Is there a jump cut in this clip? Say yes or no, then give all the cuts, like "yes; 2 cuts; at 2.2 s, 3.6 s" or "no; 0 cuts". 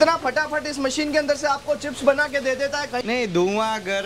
yes; 1 cut; at 3.0 s